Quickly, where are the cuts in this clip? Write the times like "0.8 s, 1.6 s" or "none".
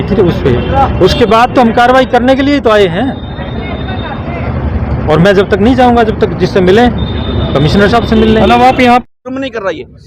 9.0 s